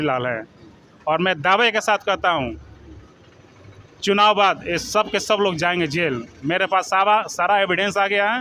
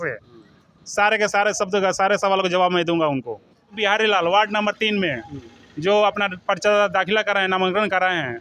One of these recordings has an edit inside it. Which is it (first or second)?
second